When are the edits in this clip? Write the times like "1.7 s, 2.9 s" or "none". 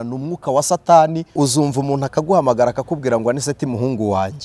1.3 s